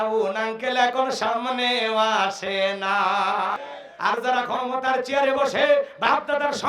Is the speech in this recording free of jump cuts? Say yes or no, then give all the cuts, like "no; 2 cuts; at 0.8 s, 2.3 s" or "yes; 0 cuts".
no; 1 cut; at 3.6 s